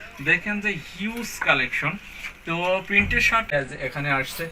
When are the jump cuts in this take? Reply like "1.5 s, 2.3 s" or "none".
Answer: 3.5 s